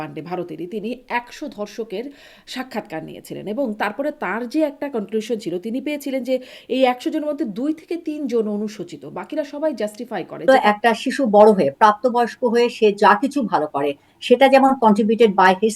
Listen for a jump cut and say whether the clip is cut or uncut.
cut